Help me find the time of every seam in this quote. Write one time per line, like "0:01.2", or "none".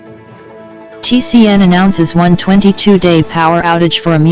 none